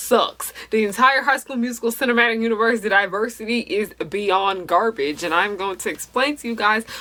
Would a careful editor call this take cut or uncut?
uncut